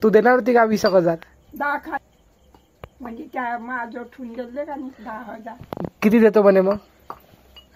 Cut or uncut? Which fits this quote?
cut